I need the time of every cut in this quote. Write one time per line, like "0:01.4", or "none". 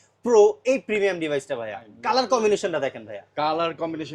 0:01.9

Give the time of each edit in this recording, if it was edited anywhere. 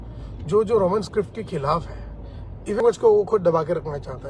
0:02.8

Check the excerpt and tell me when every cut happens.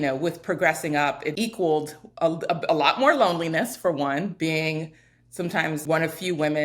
0:01.3
0:05.8

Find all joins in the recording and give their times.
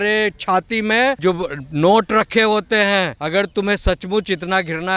0:01.2
0:03.2

